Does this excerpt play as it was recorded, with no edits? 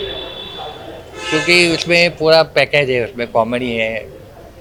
yes; 0 cuts

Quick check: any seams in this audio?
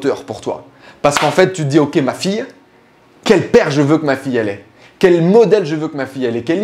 no; 0 cuts

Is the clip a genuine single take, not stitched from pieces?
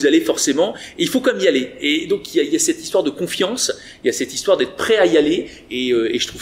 yes; 0 cuts

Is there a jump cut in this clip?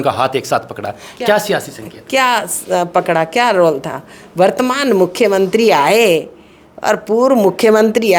no; 0 cuts

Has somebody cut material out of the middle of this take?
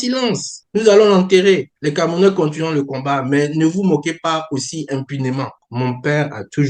yes; 1 cut; at 5.6 s

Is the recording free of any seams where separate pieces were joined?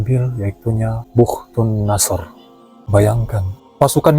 no; 1 cut; at 2.7 s

